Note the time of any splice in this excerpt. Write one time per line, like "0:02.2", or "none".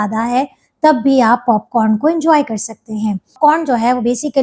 0:03.3